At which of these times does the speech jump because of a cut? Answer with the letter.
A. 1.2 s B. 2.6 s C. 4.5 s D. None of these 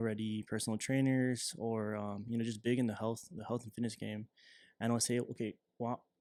D